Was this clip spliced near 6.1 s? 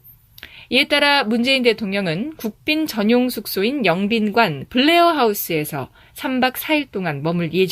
yes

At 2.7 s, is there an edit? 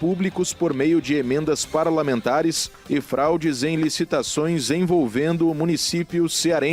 yes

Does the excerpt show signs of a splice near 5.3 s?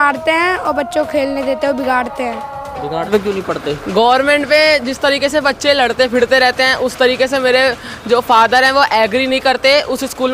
no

